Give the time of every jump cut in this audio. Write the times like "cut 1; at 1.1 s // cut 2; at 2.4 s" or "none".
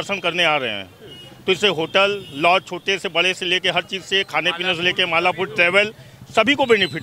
none